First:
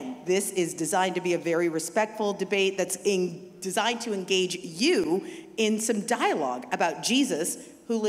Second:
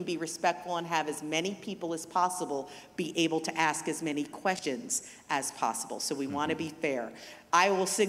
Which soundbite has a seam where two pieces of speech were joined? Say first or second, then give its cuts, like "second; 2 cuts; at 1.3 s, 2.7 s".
second; 1 cut; at 4.6 s